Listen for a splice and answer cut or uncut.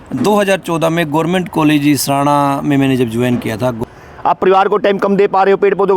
cut